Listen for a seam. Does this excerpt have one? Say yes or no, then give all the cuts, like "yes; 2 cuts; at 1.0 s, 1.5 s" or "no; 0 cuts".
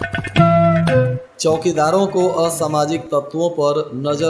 yes; 1 cut; at 1.2 s